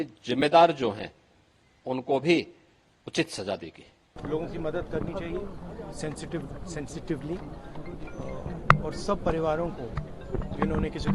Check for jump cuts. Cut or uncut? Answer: cut